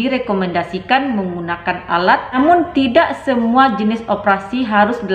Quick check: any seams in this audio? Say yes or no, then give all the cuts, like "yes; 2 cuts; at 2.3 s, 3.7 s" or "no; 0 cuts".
yes; 1 cut; at 2.4 s